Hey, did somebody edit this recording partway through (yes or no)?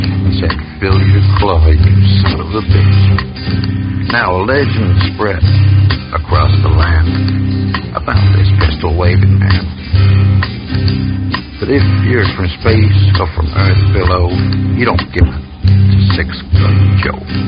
yes